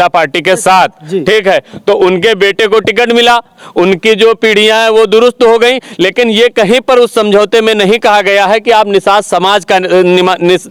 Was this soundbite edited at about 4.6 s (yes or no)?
no